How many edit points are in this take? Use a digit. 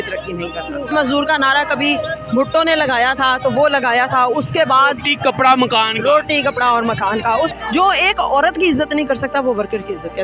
2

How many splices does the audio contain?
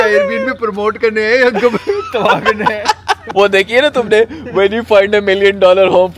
0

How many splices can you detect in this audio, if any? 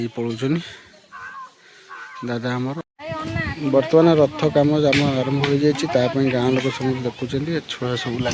1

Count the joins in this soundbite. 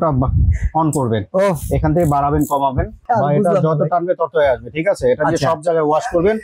1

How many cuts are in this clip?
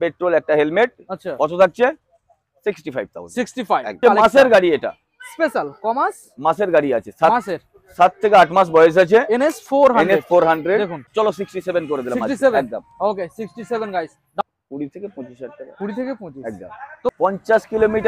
4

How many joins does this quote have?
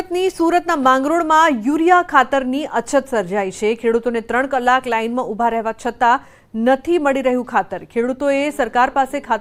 0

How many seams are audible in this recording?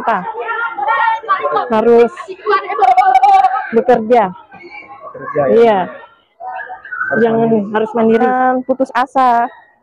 0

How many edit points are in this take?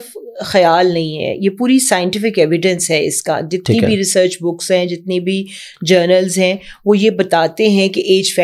0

